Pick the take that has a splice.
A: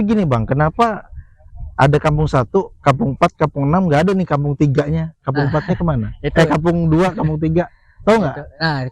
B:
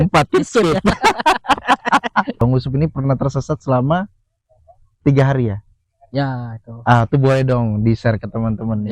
B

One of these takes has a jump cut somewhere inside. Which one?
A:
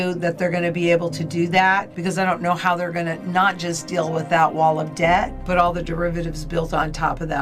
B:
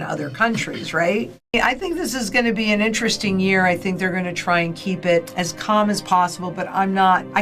B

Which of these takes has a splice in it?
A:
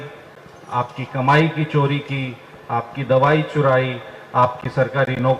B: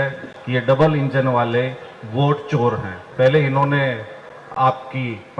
B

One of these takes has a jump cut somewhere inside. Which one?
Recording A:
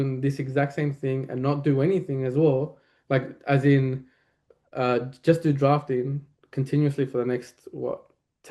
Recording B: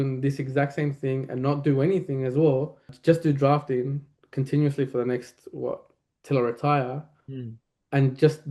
B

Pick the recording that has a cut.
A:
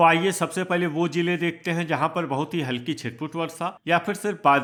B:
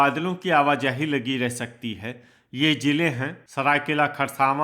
B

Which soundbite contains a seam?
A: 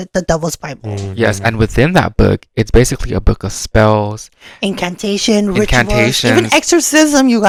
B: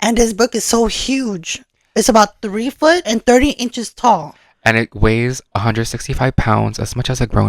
B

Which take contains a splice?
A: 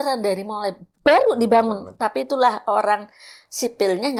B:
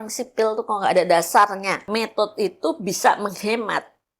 B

